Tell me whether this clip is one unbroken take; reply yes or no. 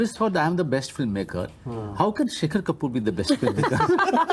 yes